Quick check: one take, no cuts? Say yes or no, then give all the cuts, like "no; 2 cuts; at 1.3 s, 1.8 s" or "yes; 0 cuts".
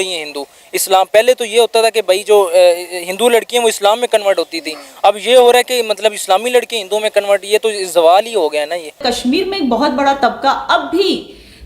no; 1 cut; at 9.0 s